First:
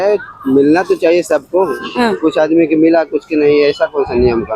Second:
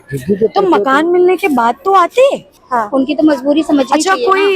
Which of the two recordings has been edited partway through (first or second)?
second